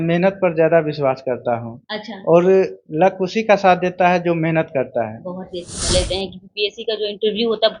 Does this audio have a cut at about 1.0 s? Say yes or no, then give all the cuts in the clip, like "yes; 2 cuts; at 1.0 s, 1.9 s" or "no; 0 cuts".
no; 1 cut; at 5.9 s